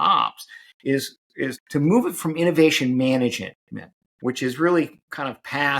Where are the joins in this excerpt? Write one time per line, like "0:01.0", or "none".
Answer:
0:01.6

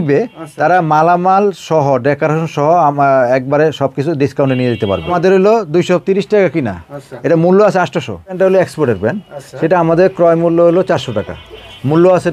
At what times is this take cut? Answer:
0:05.1
0:08.4

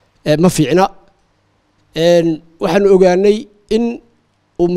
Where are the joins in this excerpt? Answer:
none

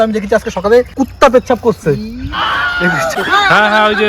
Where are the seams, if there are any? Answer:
0:00.9
0:03.2

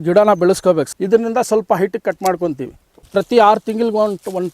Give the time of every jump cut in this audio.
0:00.9
0:03.1

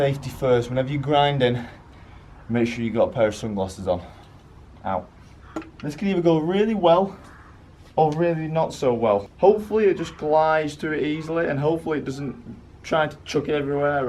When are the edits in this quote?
none

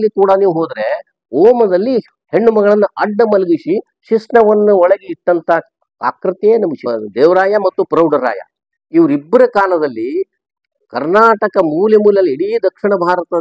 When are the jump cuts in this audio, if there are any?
0:06.8

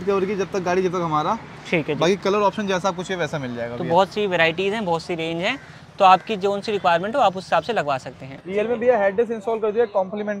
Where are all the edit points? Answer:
none

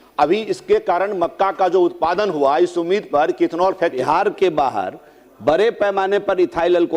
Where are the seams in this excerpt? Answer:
0:04.0

